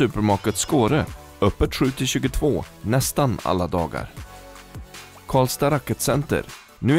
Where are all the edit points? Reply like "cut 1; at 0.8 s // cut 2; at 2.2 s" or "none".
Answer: none